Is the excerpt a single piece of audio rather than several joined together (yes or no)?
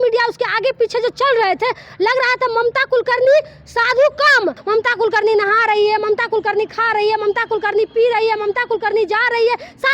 no